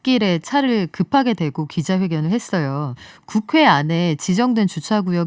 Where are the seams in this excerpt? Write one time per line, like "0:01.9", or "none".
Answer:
0:03.1